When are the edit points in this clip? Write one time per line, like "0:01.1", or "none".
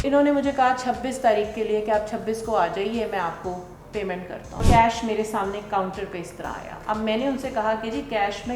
0:04.6